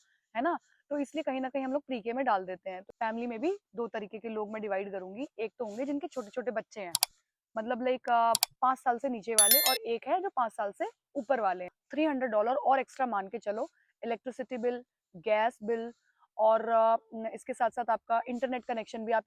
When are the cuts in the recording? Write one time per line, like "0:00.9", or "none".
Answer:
0:02.8
0:11.8